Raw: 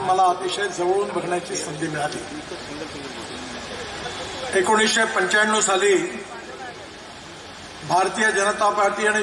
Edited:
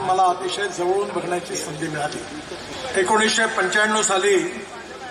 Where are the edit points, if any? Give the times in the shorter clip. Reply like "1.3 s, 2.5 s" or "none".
2.7 s